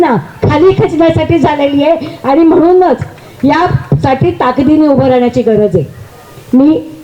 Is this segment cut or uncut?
uncut